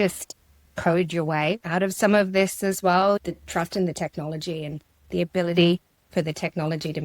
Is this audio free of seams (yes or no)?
no